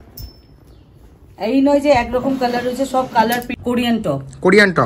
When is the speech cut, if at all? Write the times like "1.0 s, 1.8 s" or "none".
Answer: 3.5 s